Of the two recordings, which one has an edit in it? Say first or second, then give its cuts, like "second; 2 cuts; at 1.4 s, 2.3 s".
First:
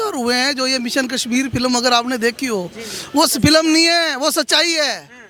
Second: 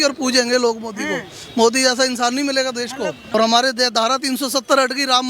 second; 1 cut; at 3.3 s